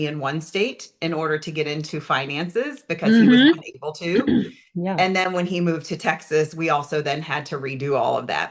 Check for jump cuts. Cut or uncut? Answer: uncut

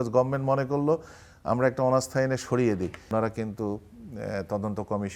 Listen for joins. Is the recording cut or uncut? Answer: cut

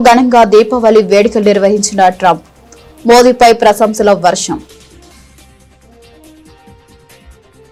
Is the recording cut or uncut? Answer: uncut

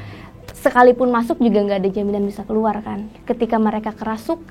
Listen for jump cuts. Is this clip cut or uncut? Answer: cut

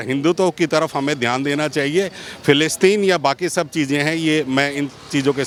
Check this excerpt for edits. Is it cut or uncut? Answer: uncut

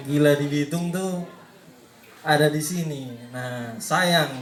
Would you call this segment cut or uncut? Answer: uncut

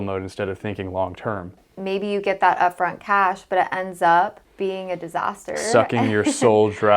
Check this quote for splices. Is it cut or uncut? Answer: cut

